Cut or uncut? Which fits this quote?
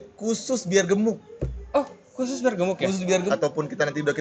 cut